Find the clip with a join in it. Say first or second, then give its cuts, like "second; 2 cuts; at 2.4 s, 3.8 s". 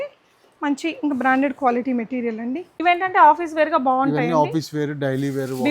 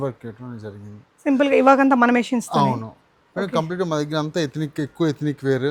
first; 1 cut; at 2.7 s